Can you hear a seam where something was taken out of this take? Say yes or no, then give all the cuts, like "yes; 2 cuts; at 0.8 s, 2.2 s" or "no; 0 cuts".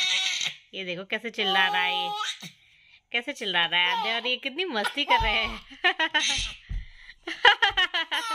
no; 0 cuts